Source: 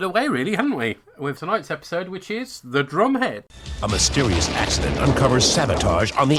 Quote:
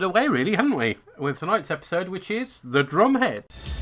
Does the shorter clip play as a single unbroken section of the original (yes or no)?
yes